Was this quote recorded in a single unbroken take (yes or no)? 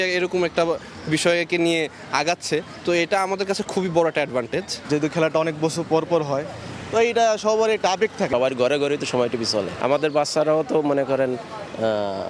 yes